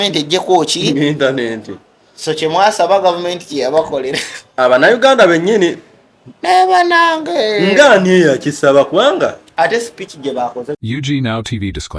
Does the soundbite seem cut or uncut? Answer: cut